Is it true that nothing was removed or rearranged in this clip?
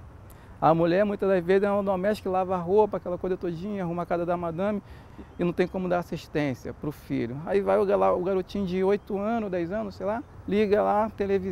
no; 2 cuts; at 5.1 s, 10.3 s

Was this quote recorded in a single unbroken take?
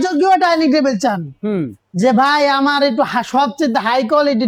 yes; 0 cuts

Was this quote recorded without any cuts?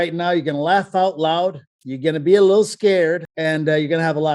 no; 1 cut; at 3.3 s

